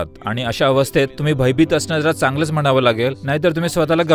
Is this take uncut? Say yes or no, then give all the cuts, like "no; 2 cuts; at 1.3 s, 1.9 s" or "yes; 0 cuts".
no; 2 cuts; at 1.2 s, 3.2 s